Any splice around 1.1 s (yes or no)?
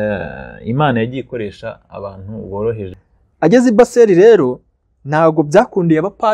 no